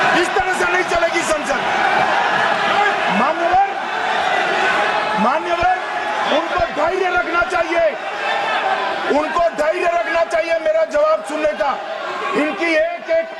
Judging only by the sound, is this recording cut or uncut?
uncut